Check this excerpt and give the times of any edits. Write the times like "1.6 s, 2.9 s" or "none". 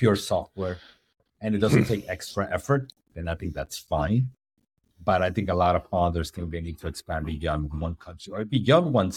none